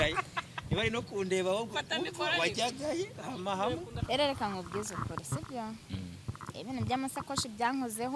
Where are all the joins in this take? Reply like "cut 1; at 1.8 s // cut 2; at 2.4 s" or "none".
cut 1; at 4.1 s

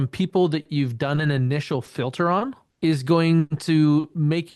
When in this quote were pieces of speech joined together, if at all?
cut 1; at 2.6 s

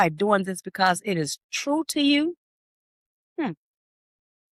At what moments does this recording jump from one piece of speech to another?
none

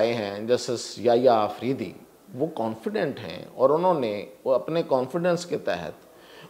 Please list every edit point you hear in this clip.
none

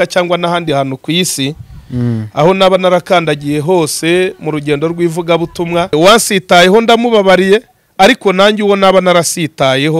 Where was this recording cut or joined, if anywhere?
cut 1; at 5.9 s

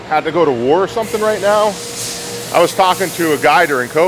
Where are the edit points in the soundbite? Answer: none

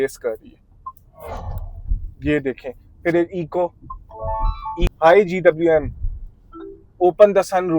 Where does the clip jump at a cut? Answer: cut 1; at 4.8 s

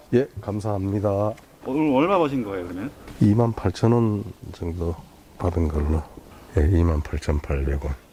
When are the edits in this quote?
none

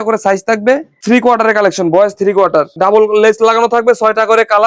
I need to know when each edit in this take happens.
cut 1; at 0.9 s // cut 2; at 2.7 s

